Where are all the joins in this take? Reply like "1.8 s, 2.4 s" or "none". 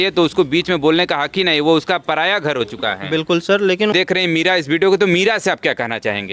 3.9 s